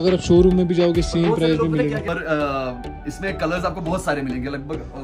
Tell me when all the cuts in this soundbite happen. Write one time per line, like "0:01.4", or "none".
0:02.0